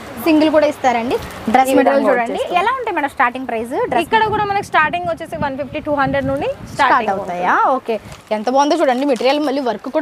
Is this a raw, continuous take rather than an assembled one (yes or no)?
no